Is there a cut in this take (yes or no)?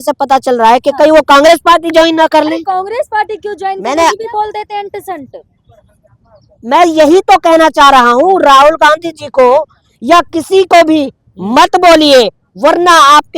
yes